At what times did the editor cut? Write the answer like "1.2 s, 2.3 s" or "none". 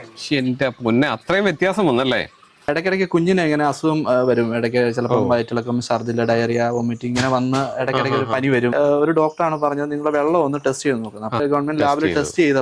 2.7 s, 8.7 s, 11.4 s